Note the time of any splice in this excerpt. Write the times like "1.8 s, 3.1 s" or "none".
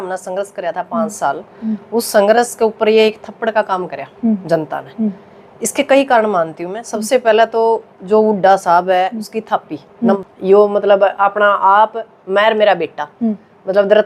10.2 s